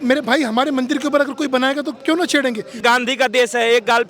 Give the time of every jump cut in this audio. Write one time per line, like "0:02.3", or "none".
0:02.8